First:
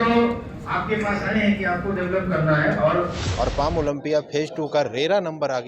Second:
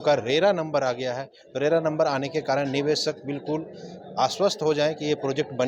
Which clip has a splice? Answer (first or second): first